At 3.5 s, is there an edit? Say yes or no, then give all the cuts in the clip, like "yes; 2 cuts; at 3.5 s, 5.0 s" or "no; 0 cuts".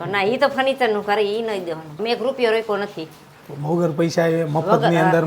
no; 1 cut; at 1.9 s